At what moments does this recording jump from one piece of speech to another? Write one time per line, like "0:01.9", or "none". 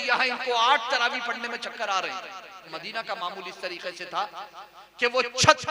0:02.7